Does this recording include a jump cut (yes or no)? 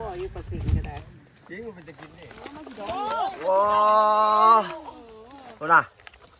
yes